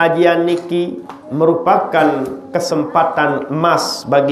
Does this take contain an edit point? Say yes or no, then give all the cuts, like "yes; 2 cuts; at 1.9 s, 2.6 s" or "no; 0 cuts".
no; 0 cuts